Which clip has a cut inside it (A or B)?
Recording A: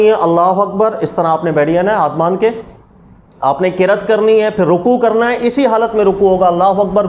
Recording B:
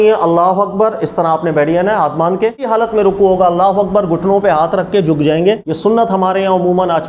B